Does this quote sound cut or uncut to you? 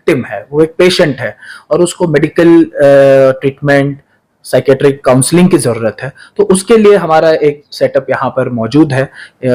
uncut